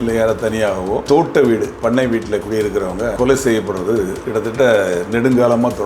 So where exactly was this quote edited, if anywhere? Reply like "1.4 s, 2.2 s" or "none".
1.0 s, 3.1 s, 4.2 s